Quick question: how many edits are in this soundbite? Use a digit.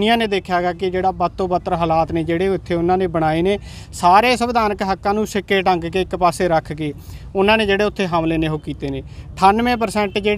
0